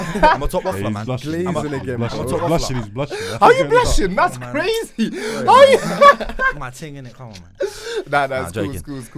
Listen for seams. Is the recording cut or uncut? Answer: uncut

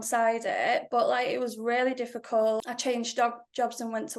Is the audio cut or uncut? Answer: cut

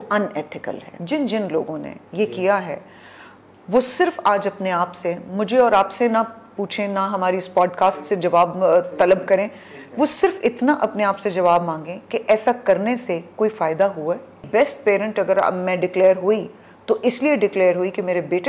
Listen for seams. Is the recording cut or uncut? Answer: cut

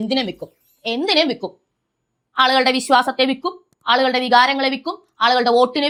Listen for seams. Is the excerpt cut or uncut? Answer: uncut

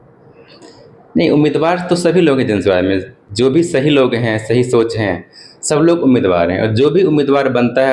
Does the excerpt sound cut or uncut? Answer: uncut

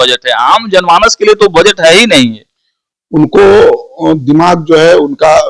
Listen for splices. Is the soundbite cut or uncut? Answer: uncut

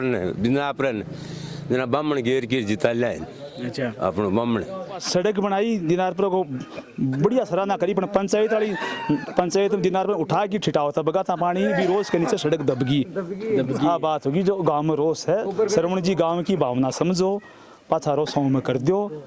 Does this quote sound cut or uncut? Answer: cut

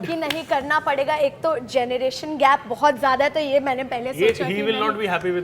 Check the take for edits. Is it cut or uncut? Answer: uncut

